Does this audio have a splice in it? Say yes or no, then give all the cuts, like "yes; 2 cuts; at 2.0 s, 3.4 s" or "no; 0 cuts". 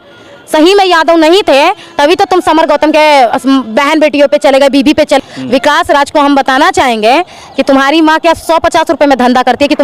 yes; 1 cut; at 5.2 s